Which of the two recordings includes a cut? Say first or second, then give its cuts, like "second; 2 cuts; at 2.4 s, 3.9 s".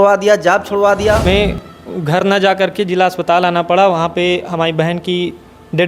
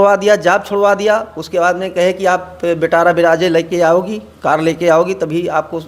first; 1 cut; at 1.2 s